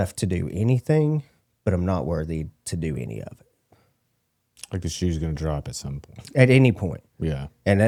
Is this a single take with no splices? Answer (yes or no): yes